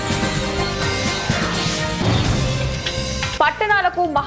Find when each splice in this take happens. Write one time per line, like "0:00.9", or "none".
0:03.3